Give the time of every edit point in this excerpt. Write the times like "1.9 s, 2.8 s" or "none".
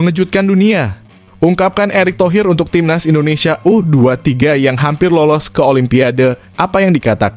none